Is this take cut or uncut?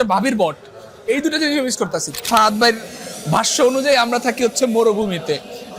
cut